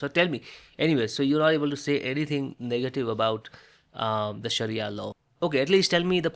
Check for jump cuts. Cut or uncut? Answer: cut